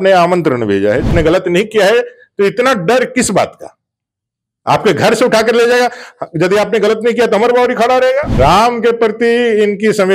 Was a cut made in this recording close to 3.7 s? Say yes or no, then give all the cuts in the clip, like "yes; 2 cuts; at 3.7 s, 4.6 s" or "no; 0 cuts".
no; 2 cuts; at 1.1 s, 8.3 s